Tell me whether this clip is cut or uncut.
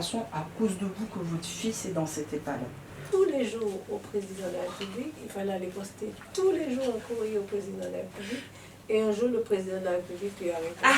cut